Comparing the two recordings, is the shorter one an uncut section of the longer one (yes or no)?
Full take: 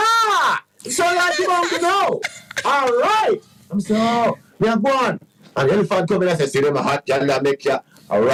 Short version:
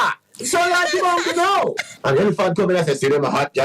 no